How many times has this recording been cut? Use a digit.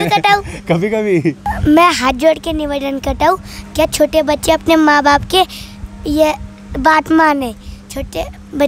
1